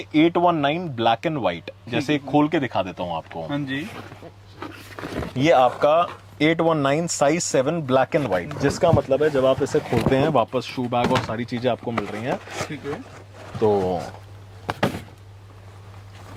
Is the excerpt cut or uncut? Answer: uncut